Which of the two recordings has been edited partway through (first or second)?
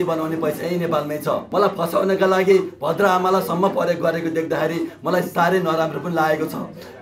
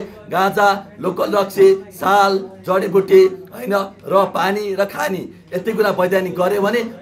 first